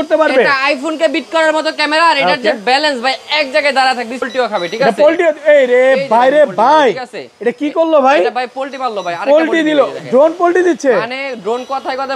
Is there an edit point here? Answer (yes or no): yes